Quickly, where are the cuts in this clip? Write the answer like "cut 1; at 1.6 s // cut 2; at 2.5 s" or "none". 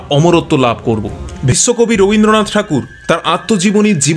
cut 1; at 1.5 s